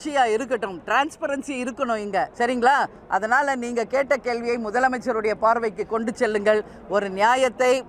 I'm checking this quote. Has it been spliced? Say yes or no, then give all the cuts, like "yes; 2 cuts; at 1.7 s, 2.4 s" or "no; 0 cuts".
yes; 1 cut; at 2.3 s